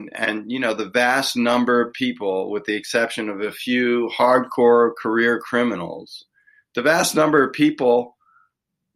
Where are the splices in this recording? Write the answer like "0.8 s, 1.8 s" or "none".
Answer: none